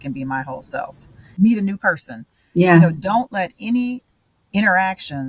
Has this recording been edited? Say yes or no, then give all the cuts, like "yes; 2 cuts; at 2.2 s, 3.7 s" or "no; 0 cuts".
yes; 1 cut; at 1.2 s